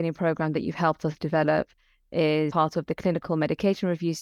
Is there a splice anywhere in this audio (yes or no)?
yes